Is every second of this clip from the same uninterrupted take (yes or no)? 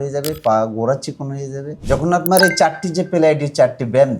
no